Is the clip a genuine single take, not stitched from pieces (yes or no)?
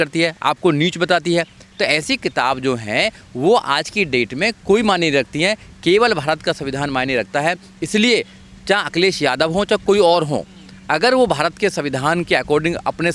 yes